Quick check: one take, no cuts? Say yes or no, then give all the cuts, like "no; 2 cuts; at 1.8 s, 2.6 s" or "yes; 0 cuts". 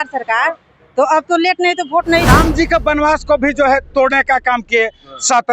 no; 1 cut; at 2.3 s